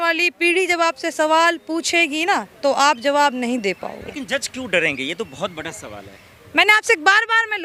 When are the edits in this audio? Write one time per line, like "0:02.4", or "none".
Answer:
none